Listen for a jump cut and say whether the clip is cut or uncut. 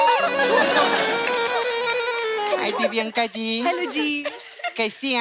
cut